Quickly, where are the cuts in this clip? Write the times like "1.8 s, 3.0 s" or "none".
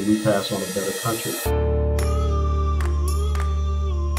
1.4 s